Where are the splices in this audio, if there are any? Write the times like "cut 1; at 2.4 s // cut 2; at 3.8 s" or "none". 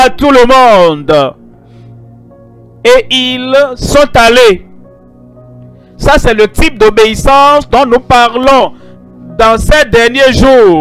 cut 1; at 1.4 s // cut 2; at 2.8 s